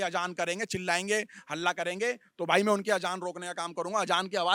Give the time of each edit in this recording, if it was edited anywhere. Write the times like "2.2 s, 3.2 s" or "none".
none